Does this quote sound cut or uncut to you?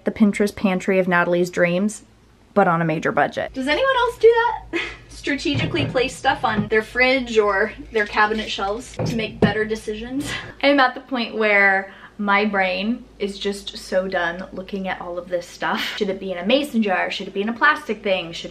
cut